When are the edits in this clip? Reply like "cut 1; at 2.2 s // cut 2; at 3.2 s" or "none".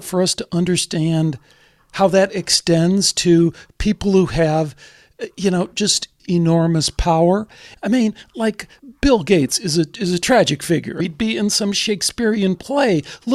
cut 1; at 6.1 s // cut 2; at 7.7 s // cut 3; at 8.8 s // cut 4; at 11.0 s